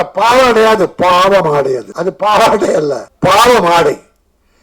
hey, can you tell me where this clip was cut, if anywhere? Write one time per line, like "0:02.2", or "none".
0:01.9
0:03.1